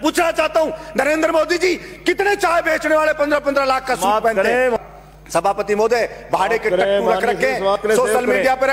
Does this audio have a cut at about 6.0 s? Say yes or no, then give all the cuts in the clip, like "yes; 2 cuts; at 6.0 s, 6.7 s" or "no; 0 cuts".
no; 1 cut; at 4.8 s